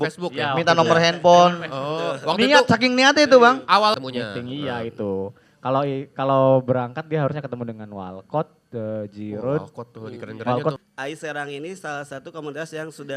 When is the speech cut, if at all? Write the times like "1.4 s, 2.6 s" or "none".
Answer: 4.0 s, 10.8 s